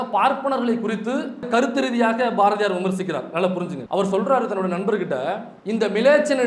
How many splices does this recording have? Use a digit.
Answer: 3